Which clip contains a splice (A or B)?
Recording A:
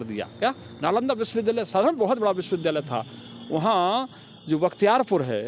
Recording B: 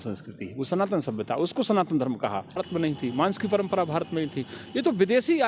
B